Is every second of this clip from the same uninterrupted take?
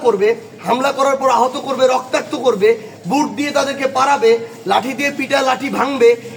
yes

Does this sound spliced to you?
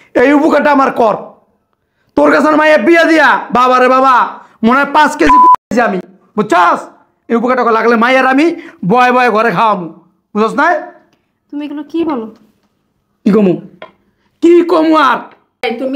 no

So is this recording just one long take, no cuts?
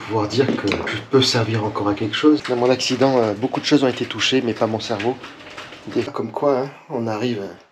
no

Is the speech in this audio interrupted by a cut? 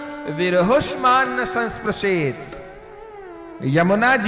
no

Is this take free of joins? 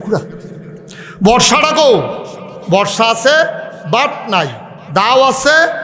yes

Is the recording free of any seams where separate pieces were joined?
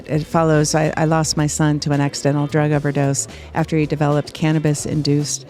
yes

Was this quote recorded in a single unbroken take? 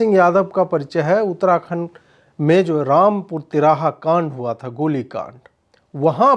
yes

